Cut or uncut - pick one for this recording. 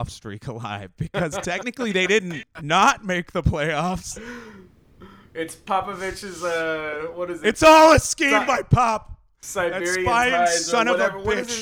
uncut